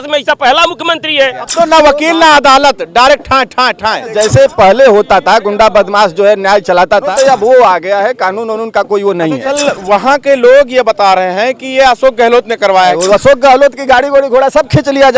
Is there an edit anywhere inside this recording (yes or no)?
yes